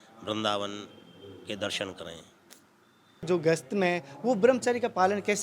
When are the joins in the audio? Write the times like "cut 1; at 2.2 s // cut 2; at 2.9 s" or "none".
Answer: cut 1; at 3.2 s